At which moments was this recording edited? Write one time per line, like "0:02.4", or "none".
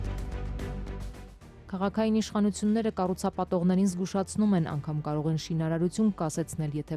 0:01.0